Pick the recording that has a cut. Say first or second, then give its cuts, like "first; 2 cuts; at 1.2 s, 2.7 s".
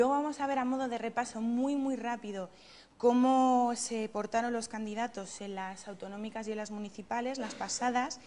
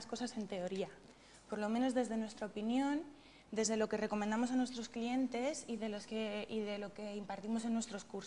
second; 1 cut; at 2.7 s